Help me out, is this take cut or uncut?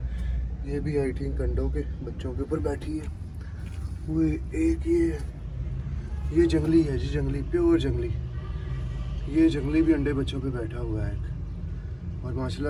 uncut